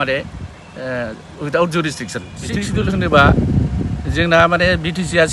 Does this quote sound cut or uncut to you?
cut